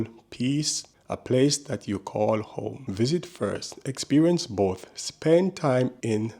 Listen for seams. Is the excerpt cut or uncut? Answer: cut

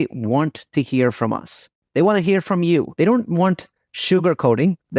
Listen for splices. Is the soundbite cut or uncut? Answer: uncut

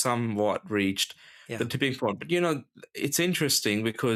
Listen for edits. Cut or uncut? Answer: uncut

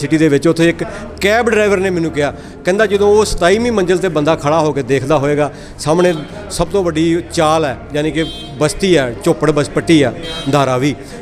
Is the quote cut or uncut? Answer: uncut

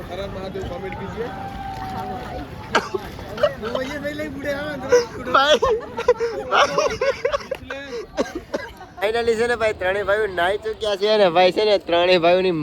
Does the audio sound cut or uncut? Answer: cut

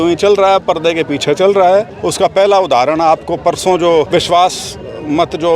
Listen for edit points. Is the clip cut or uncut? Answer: cut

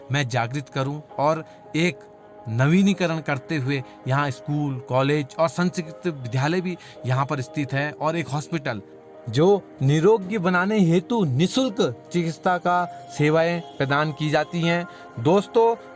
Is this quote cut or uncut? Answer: uncut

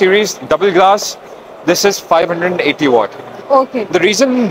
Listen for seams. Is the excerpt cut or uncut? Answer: uncut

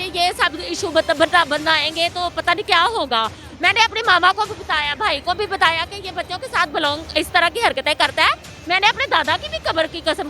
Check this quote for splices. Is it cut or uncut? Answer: uncut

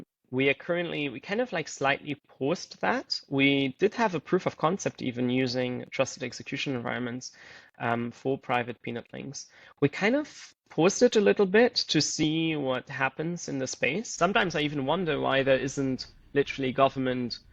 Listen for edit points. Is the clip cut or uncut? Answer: cut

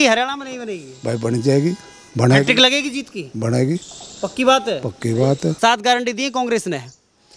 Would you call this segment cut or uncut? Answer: cut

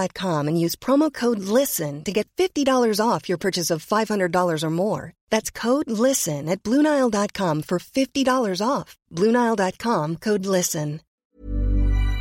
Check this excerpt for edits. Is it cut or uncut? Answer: cut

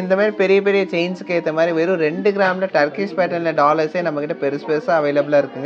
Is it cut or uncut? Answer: uncut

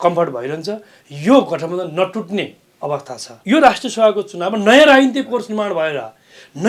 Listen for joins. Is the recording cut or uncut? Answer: cut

